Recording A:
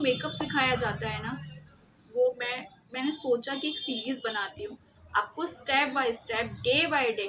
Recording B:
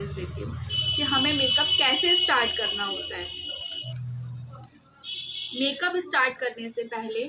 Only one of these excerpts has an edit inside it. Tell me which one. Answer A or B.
B